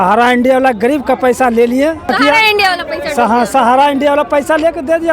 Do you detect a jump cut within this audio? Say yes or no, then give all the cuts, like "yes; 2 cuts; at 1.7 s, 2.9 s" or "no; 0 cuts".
yes; 1 cut; at 2.1 s